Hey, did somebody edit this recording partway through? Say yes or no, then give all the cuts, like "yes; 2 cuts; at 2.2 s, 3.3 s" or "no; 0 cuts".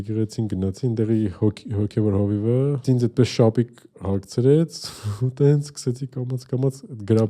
yes; 1 cut; at 2.8 s